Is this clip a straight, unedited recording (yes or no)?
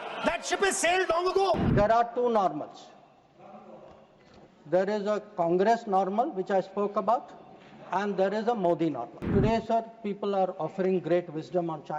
no